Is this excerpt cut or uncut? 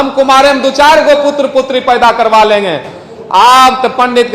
uncut